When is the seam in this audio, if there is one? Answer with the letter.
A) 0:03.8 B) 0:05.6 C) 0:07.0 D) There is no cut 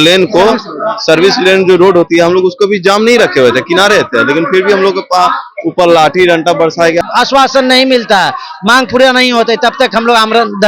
C